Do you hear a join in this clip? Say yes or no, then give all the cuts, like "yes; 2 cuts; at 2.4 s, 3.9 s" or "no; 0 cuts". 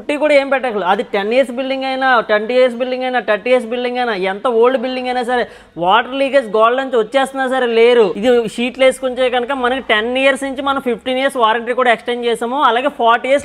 yes; 1 cut; at 8.2 s